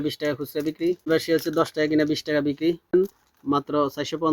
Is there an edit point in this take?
yes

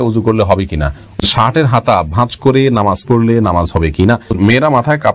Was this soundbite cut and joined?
yes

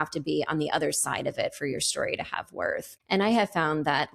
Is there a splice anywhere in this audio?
yes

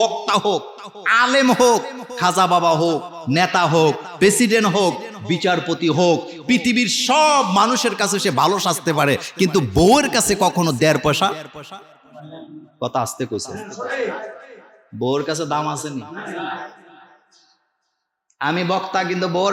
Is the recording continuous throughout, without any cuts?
yes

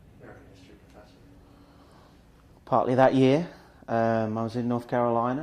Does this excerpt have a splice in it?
yes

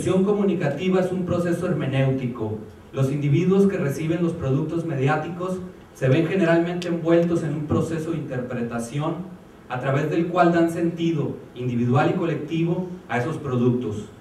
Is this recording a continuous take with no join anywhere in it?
no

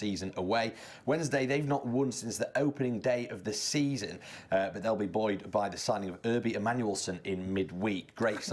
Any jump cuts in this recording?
yes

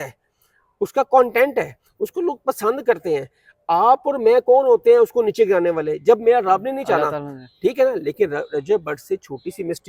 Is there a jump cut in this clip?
no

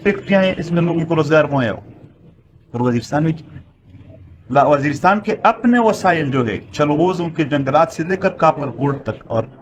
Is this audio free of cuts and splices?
yes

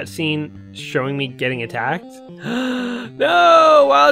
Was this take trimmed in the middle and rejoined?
no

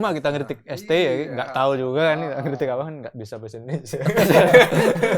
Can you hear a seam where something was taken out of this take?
no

